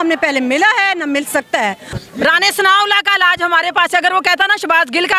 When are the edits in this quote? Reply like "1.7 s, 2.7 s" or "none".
1.9 s